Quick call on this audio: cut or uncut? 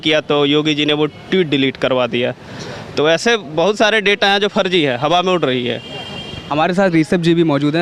uncut